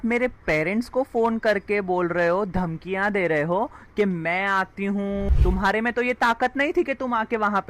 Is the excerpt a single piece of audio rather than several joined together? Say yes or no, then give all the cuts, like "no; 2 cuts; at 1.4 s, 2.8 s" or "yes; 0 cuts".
no; 1 cut; at 5.3 s